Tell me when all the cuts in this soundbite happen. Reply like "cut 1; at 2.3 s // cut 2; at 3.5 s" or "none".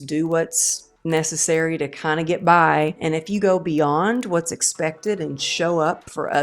cut 1; at 3.0 s

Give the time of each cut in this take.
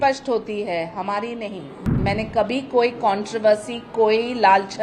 cut 1; at 2.0 s

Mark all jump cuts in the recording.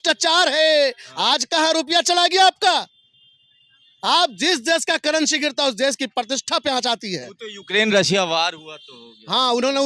none

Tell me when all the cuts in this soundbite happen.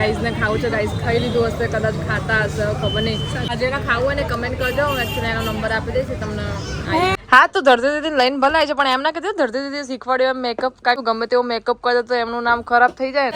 cut 1; at 3.5 s // cut 2; at 7.2 s // cut 3; at 11.0 s

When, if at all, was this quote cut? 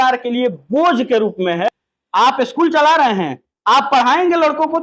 cut 1; at 1.9 s

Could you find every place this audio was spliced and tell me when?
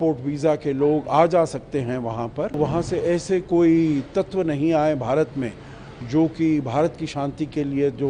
cut 1; at 2.6 s

